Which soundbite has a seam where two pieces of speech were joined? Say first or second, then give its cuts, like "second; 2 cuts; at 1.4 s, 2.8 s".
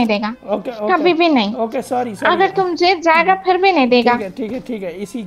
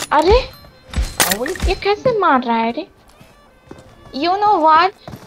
second; 1 cut; at 3.0 s